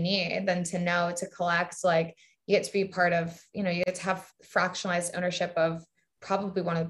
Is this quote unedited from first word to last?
no; 1 cut; at 3.8 s

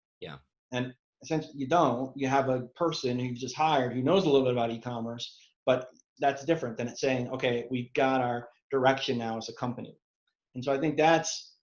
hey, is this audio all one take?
no; 1 cut; at 6.1 s

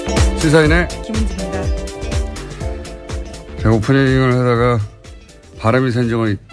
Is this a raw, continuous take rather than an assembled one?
yes; 0 cuts

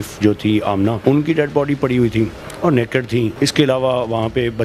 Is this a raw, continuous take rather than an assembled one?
no; 2 cuts; at 1.0 s, 3.3 s

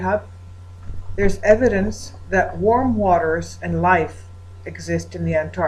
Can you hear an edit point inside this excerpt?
yes; 1 cut; at 3.5 s

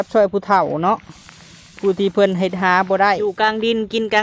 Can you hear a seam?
yes; 1 cut; at 3.2 s

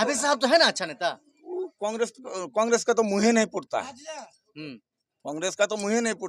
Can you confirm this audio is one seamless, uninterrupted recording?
yes; 0 cuts

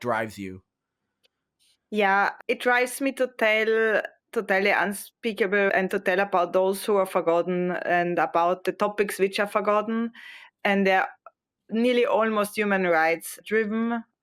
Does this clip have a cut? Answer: no; 0 cuts

